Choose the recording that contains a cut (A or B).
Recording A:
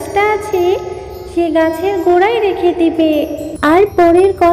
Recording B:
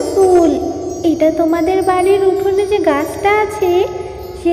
A